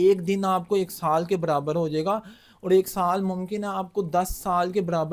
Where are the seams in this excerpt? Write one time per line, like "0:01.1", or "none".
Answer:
none